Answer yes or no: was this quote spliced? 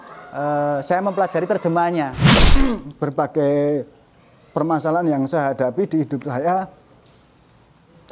yes